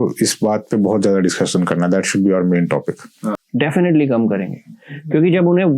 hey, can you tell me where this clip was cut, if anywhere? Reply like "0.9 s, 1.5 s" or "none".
3.4 s